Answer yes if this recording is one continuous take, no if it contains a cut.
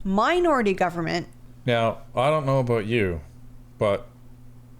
no